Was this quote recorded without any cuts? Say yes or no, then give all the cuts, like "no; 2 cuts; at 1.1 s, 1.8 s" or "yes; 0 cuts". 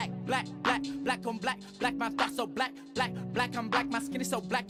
yes; 0 cuts